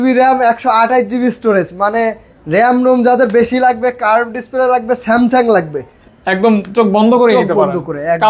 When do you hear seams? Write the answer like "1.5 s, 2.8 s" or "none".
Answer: none